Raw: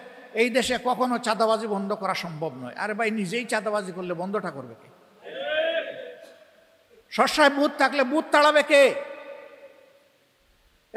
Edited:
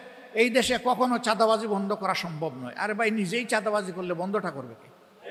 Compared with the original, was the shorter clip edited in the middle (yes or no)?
no